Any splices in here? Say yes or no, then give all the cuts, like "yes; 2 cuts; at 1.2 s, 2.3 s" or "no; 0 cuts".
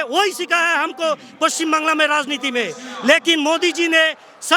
no; 0 cuts